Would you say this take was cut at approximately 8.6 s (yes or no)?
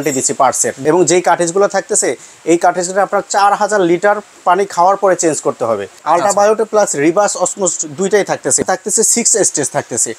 yes